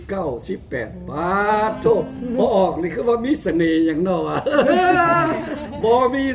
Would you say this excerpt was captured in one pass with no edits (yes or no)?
yes